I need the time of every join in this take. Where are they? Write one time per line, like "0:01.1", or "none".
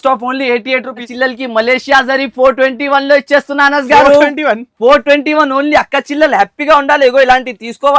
0:01.0